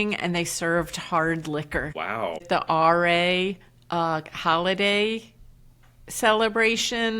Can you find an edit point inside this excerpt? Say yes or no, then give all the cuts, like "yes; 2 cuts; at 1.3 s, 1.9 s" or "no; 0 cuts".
yes; 1 cut; at 2.4 s